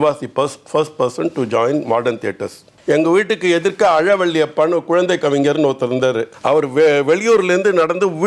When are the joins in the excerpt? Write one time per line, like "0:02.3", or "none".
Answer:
0:02.7
0:06.3